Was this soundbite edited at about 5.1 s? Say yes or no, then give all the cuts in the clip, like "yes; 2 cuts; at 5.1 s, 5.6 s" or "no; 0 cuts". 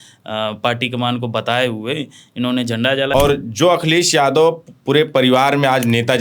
no; 1 cut; at 3.1 s